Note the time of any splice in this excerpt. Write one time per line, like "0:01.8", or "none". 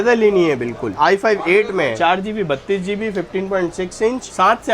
0:00.9
0:01.9